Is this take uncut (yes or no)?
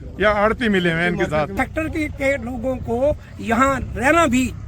no